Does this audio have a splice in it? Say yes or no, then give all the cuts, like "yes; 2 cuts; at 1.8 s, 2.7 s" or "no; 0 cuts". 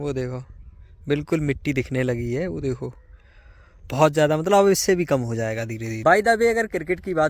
no; 0 cuts